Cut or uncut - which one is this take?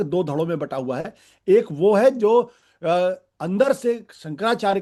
uncut